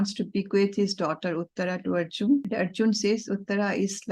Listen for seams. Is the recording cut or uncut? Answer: cut